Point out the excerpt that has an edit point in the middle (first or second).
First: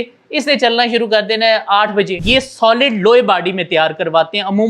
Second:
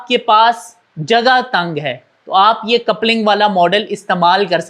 first